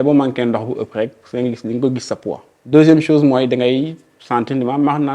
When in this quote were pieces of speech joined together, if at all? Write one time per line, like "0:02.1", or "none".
0:02.5